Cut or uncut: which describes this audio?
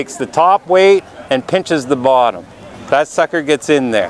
uncut